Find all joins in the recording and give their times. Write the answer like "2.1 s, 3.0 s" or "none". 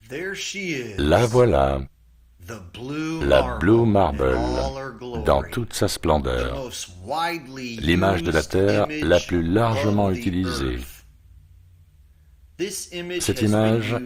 none